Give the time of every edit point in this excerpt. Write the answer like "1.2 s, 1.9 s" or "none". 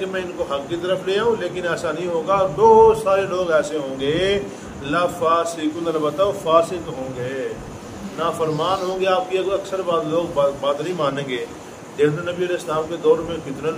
none